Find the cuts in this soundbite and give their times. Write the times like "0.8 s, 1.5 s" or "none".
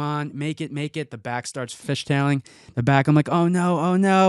1.8 s

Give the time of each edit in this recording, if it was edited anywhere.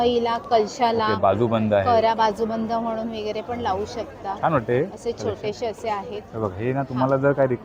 none

